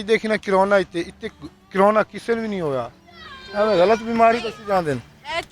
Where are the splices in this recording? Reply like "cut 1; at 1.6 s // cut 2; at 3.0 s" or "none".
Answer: none